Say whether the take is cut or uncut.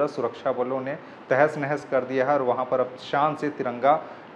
uncut